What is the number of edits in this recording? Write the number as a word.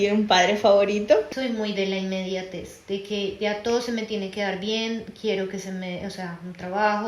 one